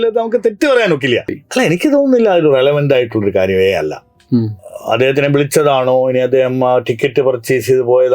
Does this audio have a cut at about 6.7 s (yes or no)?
no